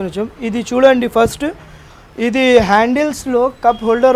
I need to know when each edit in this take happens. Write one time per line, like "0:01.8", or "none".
none